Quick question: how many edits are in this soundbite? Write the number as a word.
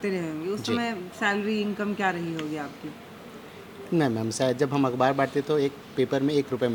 zero